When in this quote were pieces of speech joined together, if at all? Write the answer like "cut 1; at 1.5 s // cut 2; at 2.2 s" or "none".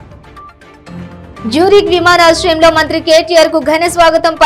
cut 1; at 1.2 s